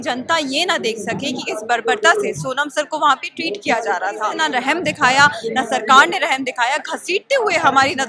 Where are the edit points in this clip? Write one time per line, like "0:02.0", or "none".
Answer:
0:04.3